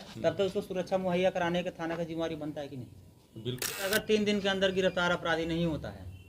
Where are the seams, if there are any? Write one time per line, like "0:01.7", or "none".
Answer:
0:03.9